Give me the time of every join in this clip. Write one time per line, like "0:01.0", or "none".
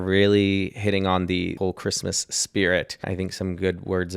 0:01.5
0:03.1